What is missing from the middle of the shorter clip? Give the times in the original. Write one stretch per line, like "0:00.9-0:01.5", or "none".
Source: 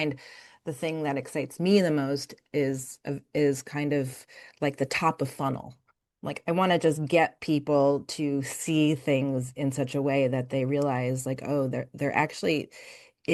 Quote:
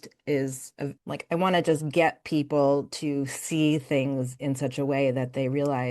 0:03.2-0:06.1